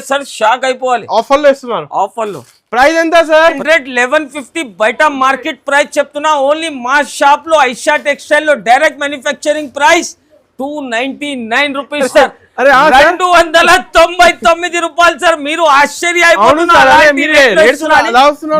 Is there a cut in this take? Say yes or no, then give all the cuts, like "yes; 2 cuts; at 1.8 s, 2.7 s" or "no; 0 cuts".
yes; 1 cut; at 3.6 s